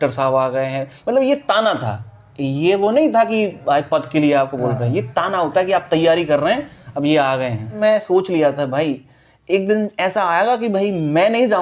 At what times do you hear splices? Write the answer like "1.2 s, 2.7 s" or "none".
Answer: 7.8 s